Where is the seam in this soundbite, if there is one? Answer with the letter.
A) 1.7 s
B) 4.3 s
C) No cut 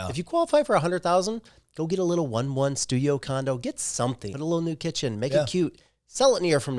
B